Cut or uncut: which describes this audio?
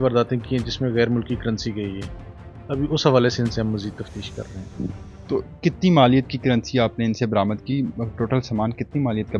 uncut